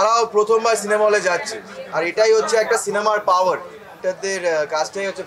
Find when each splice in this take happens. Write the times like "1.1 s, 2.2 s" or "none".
4.0 s